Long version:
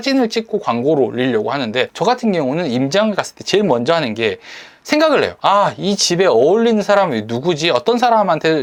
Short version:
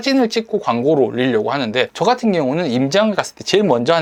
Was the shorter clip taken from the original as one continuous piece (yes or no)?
yes